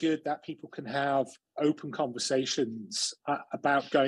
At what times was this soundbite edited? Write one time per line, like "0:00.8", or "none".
none